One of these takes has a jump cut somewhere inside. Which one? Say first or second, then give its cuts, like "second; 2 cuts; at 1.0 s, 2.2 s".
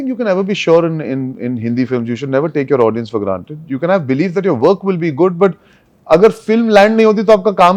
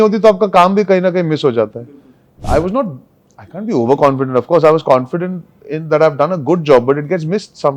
second; 1 cut; at 2.4 s